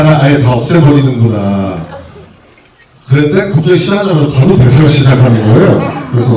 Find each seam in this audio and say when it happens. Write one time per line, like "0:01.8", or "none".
none